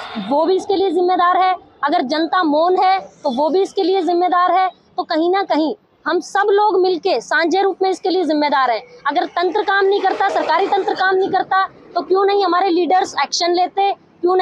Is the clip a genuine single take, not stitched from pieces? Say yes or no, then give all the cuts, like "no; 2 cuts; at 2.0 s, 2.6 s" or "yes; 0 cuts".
yes; 0 cuts